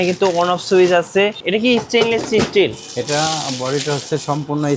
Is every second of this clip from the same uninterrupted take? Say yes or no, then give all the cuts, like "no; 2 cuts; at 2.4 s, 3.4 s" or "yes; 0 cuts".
no; 1 cut; at 1.4 s